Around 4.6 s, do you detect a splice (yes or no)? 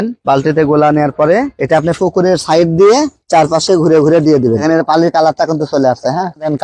yes